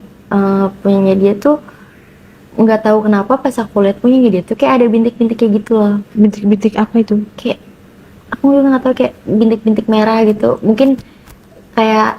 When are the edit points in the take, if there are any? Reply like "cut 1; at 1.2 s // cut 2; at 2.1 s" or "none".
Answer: none

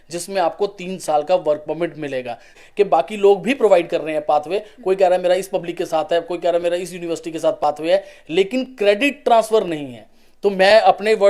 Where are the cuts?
cut 1; at 2.6 s

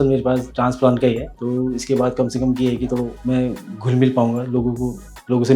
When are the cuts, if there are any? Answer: cut 1; at 1.3 s // cut 2; at 3.2 s

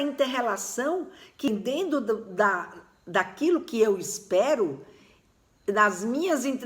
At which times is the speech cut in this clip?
cut 1; at 1.5 s

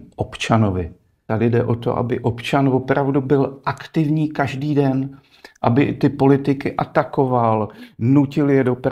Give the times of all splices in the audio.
cut 1; at 1.2 s

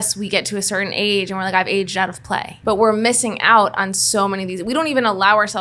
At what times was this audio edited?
cut 1; at 2.5 s

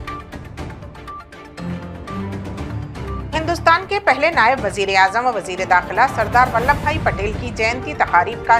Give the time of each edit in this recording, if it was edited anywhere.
cut 1; at 3.1 s

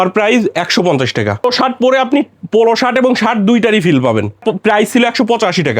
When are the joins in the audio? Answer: cut 1; at 1.4 s // cut 2; at 4.4 s

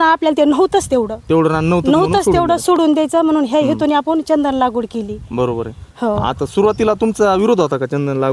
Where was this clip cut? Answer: none

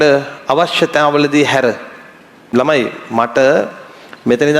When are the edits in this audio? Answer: cut 1; at 2.5 s

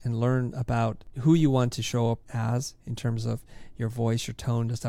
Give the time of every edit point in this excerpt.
cut 1; at 1.1 s // cut 2; at 2.3 s

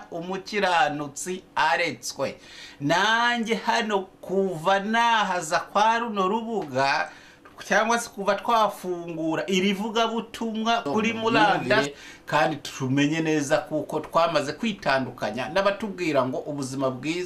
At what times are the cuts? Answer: cut 1; at 11.9 s

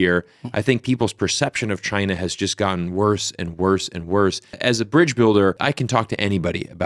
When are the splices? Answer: cut 1; at 4.5 s // cut 2; at 5.6 s

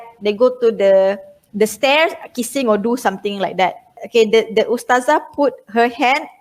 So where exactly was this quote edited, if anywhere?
cut 1; at 4.0 s

